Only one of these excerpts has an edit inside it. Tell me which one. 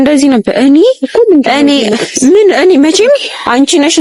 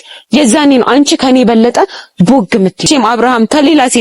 second; 1 cut; at 2.9 s

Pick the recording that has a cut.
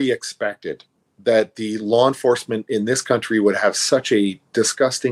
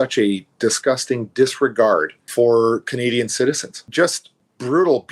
second; 2 cuts; at 2.2 s, 3.8 s

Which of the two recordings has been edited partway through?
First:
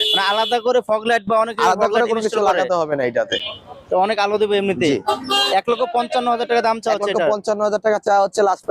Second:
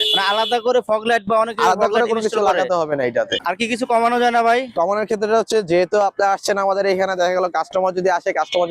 second; 1 cut; at 3.4 s

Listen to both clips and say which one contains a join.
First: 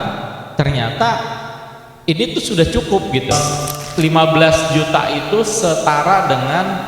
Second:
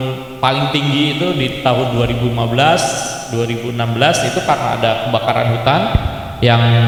first; 1 cut; at 3.4 s

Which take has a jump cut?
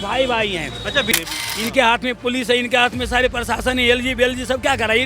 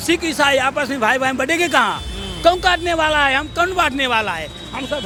first; 1 cut; at 1.1 s

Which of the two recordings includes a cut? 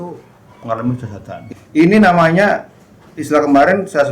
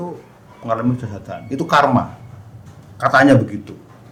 first; 1 cut; at 1.4 s

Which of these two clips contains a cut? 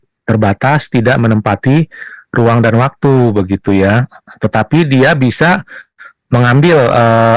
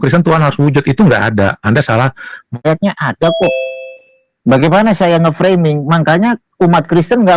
second; 1 cut; at 2.6 s

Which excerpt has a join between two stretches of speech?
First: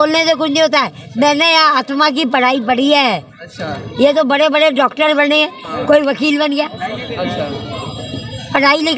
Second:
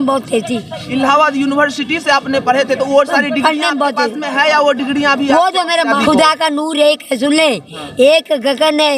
second; 1 cut; at 6.0 s

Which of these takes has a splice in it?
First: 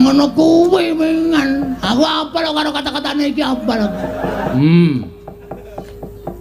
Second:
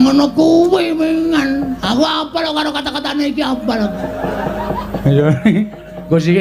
first; 1 cut; at 4.5 s

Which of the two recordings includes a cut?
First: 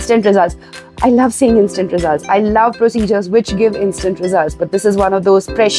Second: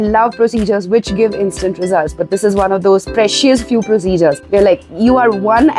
second; 1 cut; at 4.4 s

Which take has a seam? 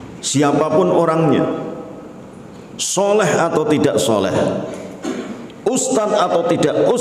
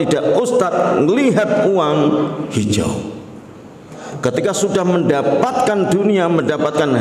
second; 1 cut; at 4.0 s

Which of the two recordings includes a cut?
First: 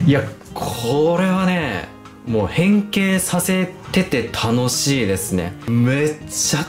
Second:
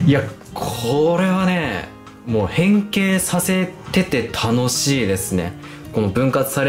first; 1 cut; at 5.7 s

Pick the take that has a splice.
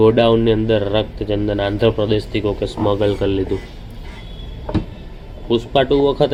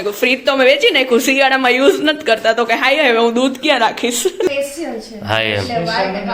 second; 1 cut; at 4.5 s

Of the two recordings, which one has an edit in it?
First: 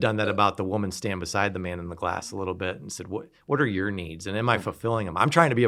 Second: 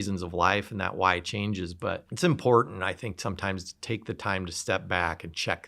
second; 1 cut; at 2.1 s

